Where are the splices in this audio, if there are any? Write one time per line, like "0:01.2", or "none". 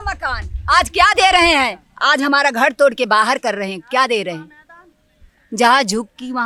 none